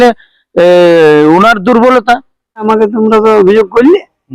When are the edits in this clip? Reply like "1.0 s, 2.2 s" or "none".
2.7 s